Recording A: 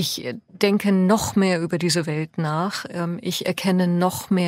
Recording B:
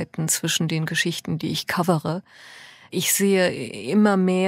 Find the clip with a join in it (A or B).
B